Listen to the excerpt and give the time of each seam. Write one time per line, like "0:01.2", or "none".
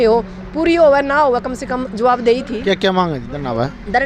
none